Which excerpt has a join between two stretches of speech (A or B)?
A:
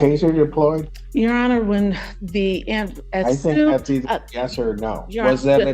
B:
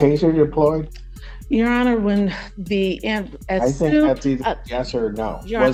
A